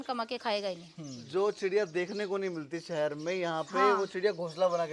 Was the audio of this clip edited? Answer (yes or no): yes